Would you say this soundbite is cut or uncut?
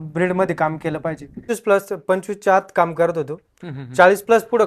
cut